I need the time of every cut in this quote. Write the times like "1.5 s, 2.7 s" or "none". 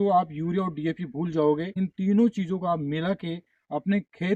1.7 s